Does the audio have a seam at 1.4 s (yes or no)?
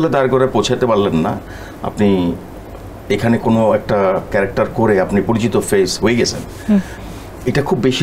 no